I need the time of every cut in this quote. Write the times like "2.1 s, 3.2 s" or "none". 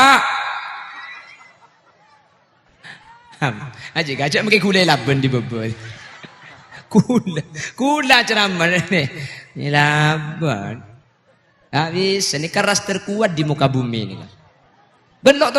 2.7 s